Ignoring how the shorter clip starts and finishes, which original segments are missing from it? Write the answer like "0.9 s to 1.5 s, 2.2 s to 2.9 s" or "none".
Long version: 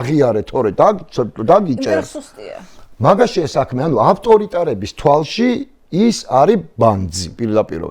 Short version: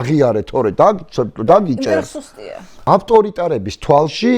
2.9 s to 4.0 s